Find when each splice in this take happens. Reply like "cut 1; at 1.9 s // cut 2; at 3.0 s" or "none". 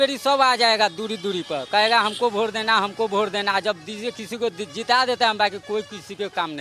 none